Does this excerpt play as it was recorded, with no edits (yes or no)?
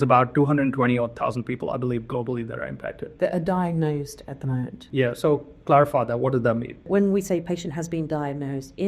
no